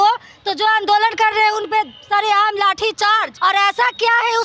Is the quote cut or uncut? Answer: cut